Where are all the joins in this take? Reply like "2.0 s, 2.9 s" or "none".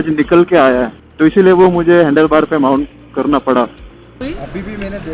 4.2 s